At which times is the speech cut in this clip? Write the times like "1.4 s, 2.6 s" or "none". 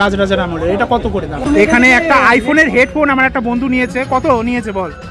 1.3 s